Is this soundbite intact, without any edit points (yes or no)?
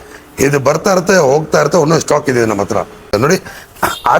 no